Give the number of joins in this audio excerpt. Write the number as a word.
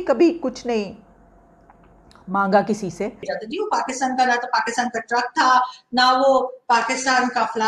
one